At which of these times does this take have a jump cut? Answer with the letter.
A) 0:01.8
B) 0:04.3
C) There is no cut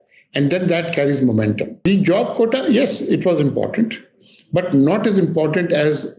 A